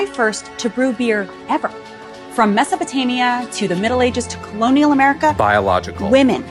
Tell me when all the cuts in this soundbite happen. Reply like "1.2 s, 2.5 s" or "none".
none